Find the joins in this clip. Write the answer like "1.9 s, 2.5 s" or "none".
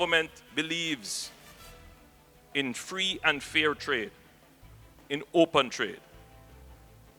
none